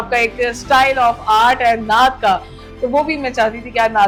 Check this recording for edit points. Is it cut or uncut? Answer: uncut